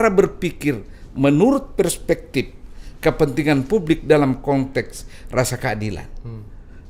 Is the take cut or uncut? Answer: uncut